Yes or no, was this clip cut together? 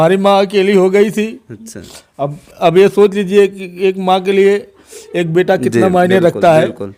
no